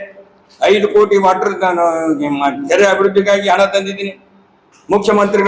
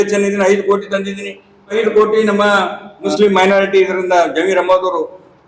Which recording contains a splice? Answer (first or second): second